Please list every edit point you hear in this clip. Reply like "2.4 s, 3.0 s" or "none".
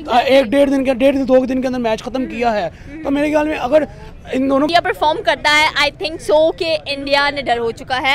4.7 s